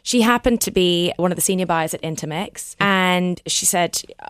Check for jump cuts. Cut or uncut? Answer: cut